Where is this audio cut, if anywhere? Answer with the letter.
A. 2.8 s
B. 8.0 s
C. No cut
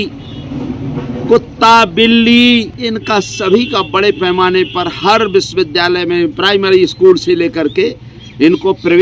A